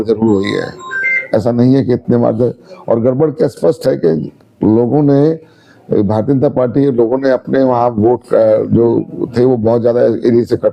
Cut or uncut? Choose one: uncut